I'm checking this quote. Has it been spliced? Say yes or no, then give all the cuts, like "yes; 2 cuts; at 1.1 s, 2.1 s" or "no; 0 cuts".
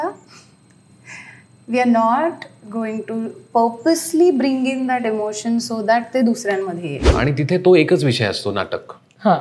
yes; 1 cut; at 7.1 s